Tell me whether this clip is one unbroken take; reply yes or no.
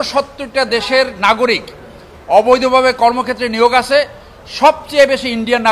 yes